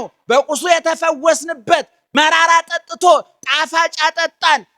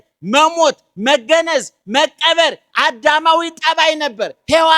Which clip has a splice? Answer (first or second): first